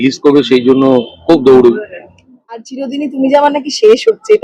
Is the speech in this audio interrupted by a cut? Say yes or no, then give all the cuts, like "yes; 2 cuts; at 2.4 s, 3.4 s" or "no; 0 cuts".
yes; 1 cut; at 2.7 s